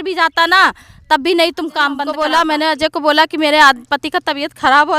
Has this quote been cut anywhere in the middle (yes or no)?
yes